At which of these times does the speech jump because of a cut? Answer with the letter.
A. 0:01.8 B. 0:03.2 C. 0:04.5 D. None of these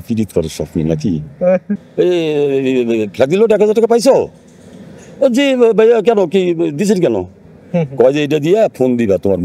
A